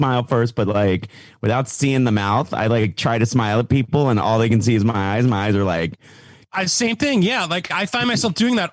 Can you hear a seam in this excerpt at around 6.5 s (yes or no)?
yes